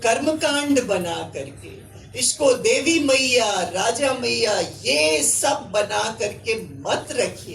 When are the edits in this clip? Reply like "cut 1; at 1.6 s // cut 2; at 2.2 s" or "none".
none